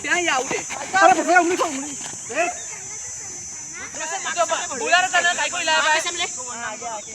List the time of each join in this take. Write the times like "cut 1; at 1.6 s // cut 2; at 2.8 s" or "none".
cut 1; at 4.0 s